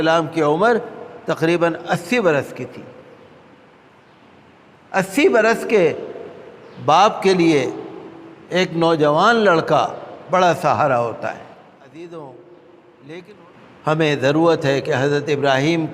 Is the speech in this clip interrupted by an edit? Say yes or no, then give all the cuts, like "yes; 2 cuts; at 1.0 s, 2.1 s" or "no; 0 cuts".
yes; 1 cut; at 11.9 s